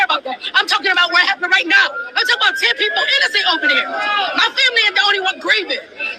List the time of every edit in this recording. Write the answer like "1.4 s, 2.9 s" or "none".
4.6 s

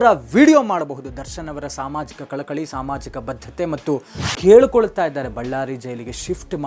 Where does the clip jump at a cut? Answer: 4.2 s

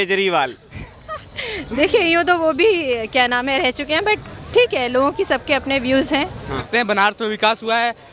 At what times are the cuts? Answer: 6.6 s

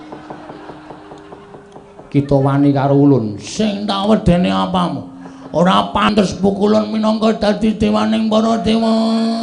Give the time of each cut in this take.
6.1 s

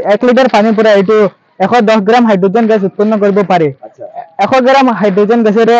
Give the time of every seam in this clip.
none

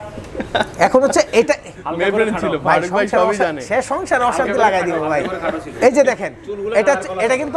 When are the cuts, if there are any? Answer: none

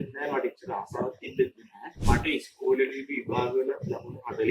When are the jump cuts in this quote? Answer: 2.0 s

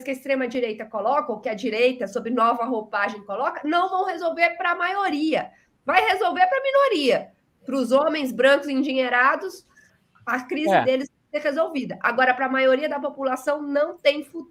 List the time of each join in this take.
none

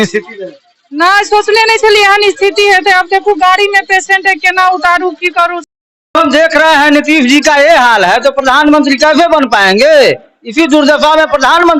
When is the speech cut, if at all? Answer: 6.1 s

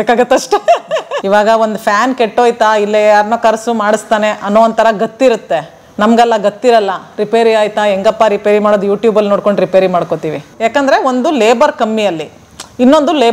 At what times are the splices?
1.2 s, 10.6 s

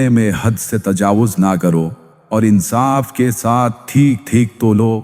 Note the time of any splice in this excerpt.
2.1 s

